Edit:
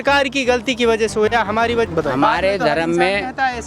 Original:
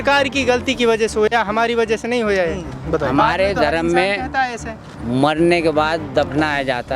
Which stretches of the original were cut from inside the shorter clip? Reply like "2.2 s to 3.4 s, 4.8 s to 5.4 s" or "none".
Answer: 1.9 s to 2.8 s

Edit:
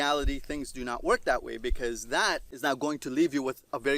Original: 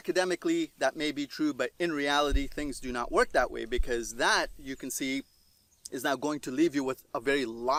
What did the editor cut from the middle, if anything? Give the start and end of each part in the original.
4.6 s to 5.9 s

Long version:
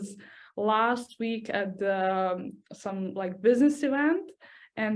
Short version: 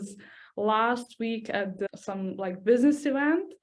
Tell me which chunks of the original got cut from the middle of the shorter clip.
1.9 s to 2.6 s

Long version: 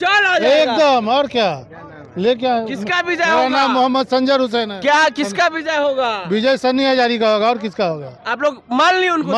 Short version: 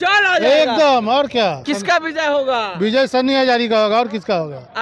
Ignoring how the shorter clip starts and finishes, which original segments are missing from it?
1.6 s to 5.1 s

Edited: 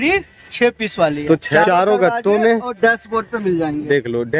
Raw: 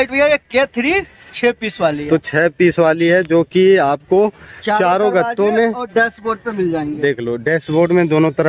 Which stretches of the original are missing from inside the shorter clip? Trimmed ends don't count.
2.3 s to 4.6 s

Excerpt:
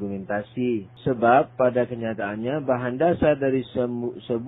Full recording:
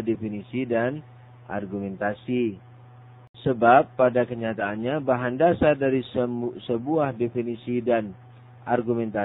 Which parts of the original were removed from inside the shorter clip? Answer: 2.6 s to 3.3 s

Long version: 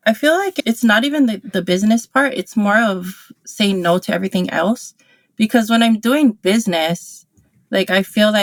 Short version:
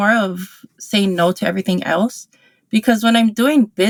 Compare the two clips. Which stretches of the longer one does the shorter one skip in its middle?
none

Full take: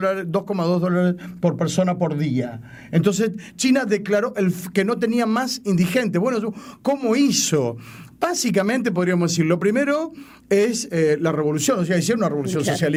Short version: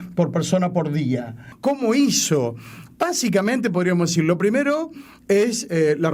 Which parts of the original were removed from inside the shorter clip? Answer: 2.7 s to 6.6 s

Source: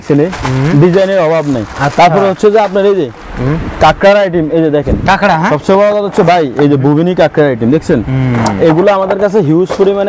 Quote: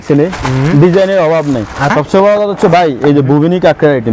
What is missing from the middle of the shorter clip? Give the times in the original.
1.9 s to 5.5 s

